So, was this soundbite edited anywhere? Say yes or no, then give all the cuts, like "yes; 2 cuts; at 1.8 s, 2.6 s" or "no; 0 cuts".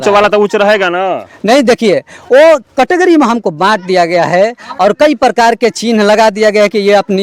no; 0 cuts